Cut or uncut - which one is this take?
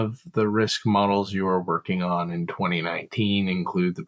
uncut